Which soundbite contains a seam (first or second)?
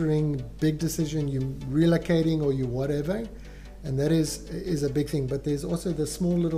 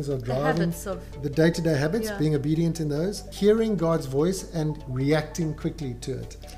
second